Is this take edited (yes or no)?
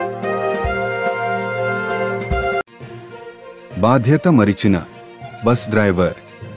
yes